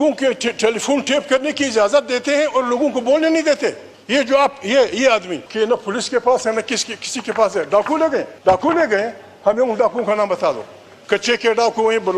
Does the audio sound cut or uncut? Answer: cut